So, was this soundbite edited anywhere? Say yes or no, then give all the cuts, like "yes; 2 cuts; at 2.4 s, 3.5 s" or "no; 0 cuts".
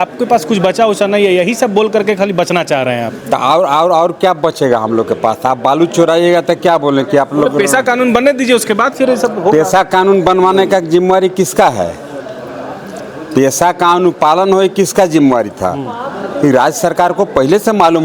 no; 0 cuts